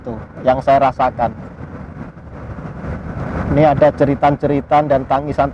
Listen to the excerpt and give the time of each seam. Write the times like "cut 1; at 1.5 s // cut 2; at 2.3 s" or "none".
none